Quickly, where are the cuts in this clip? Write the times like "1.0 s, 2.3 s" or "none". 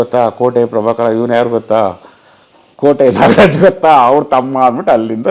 none

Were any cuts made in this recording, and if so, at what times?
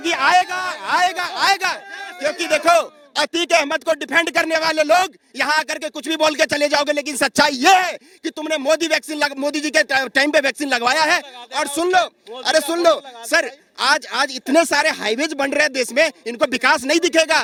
none

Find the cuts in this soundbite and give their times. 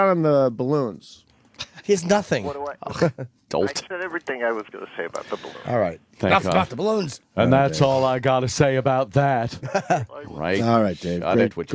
none

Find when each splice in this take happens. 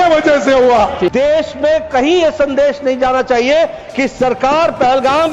1.1 s

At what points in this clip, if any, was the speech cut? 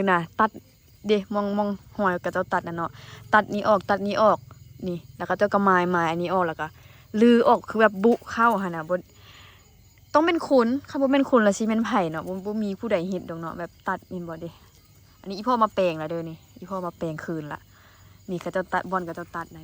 none

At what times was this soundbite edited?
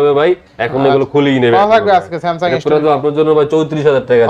none

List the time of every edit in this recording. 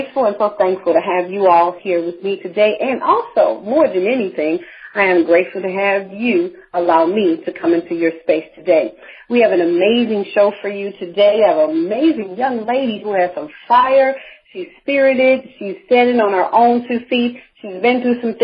none

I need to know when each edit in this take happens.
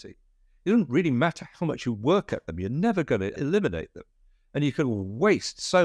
3.4 s

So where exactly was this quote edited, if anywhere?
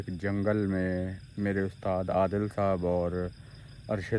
none

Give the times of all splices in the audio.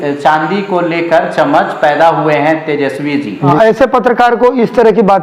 3.5 s

